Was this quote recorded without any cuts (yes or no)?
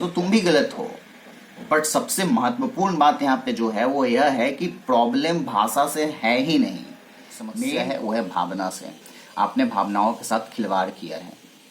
no